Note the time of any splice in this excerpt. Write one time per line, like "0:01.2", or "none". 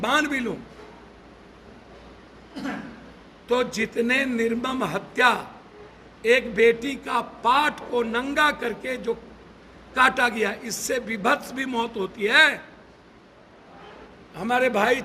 0:14.1